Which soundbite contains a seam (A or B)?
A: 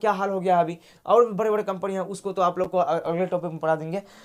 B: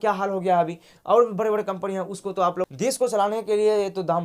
B